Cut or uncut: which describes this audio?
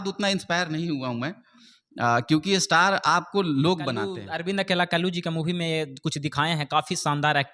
cut